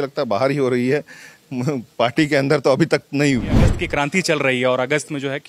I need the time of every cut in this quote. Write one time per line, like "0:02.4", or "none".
0:03.8